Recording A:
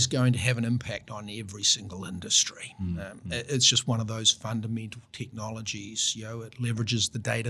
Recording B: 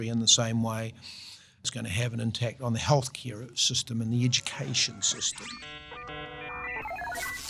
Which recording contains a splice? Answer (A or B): B